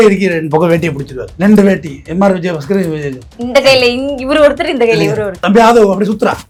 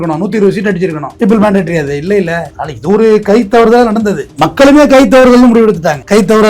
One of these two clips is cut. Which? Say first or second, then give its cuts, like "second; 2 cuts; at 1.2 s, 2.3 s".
second; 1 cut; at 4.3 s